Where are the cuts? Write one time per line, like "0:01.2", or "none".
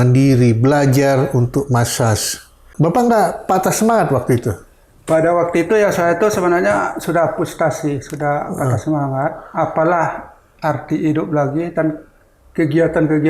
0:02.7